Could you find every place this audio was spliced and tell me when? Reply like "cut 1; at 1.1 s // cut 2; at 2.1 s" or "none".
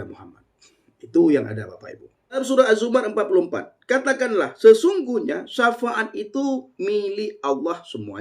cut 1; at 2.4 s